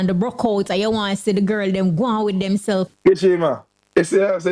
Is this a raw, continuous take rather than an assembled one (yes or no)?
no